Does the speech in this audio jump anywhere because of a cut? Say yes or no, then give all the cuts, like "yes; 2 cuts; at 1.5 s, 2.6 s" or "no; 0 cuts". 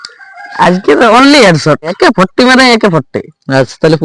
yes; 1 cut; at 1.9 s